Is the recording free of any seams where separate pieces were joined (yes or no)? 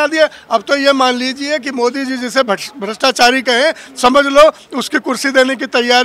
yes